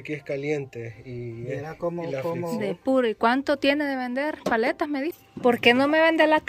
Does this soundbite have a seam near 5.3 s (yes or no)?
yes